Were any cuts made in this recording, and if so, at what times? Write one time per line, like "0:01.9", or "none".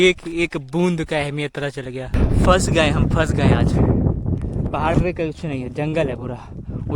0:02.1